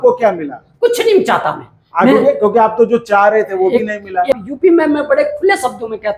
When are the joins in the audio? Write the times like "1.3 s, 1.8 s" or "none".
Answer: 4.4 s